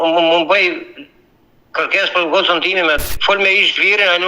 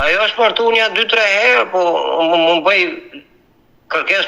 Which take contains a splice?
first; 1 cut; at 3.1 s

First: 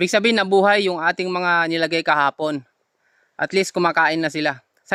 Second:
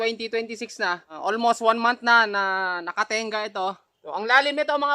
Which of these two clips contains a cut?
second; 2 cuts; at 1.1 s, 3.9 s

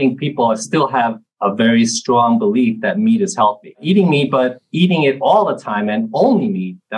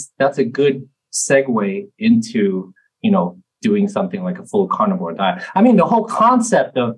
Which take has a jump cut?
first; 2 cuts; at 1.3 s, 3.8 s

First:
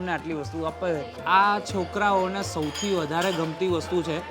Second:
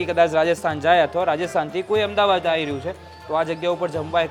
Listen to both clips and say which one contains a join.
first; 1 cut; at 1.1 s

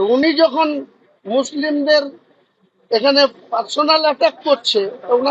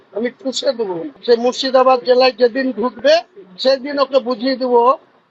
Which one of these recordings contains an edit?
second; 1 cut; at 1.1 s

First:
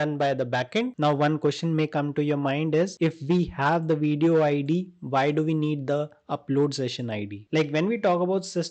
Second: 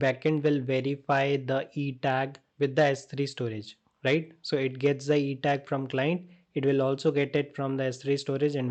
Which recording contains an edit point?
first; 2 cuts; at 0.9 s, 7.3 s

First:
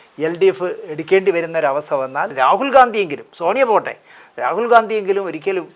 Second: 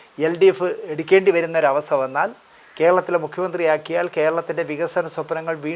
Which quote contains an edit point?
first; 1 cut; at 2.3 s

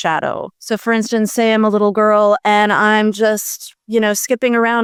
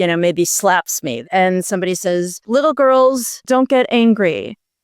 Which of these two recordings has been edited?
second; 3 cuts; at 1.2 s, 2.4 s, 3.4 s

